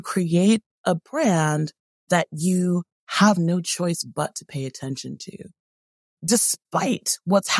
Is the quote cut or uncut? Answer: cut